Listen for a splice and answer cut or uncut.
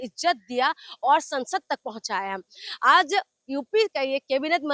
uncut